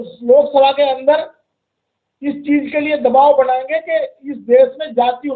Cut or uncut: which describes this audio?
uncut